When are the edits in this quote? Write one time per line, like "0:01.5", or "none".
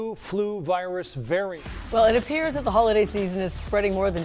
0:01.6